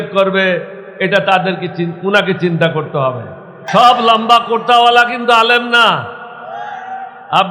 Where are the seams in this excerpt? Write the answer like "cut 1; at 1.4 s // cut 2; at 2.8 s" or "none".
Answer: cut 1; at 3.6 s

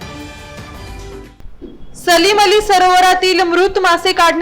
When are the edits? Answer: none

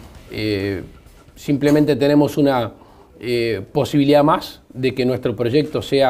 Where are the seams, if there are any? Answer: none

